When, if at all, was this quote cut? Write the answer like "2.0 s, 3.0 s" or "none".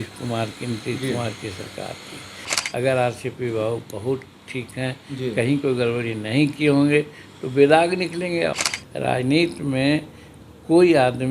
2.5 s, 8.5 s